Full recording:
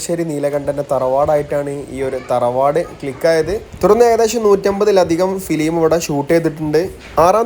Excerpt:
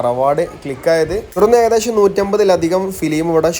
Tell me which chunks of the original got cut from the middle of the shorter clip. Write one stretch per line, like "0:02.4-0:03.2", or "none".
0:03.7-0:03.8

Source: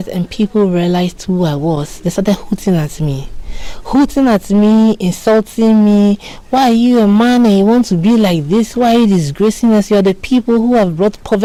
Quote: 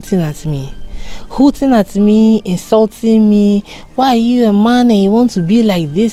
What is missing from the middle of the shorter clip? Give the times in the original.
none

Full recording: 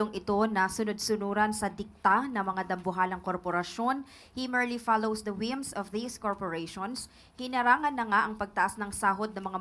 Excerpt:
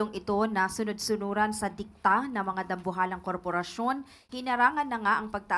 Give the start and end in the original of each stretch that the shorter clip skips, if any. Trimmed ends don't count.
0:04.2-0:07.2

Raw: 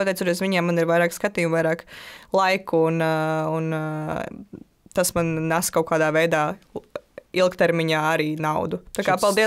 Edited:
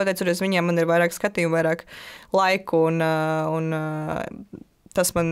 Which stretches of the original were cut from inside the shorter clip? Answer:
none

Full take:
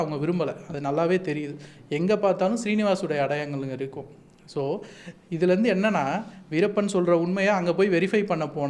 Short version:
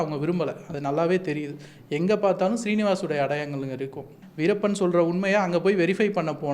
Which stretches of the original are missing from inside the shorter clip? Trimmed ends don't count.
0:04.2-0:06.3

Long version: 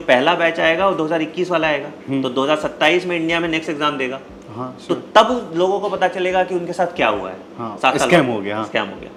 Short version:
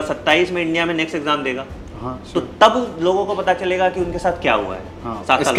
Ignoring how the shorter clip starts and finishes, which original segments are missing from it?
none

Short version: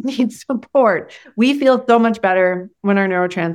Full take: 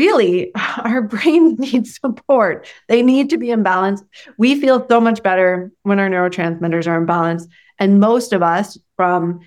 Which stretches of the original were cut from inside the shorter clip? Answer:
0:02.7-0:04.2

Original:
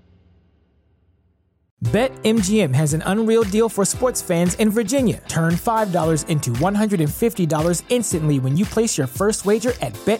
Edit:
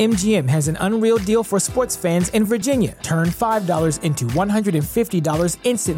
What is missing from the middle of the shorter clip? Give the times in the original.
none

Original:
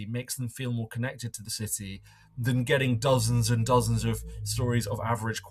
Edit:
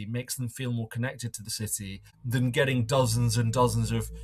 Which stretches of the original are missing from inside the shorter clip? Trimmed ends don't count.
0:02.1-0:02.2

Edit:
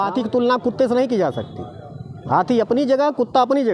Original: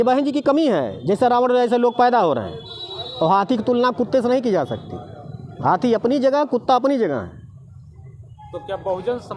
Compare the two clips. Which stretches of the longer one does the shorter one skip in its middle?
none

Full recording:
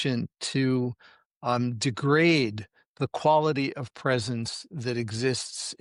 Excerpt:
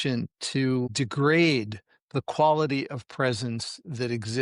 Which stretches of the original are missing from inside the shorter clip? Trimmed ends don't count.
0:00.9-0:01.8

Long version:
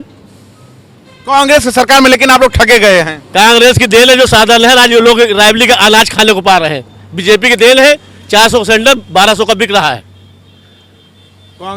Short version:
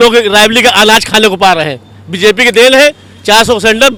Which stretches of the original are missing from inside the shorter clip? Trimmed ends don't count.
none

